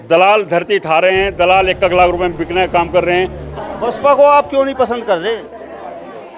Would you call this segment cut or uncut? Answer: cut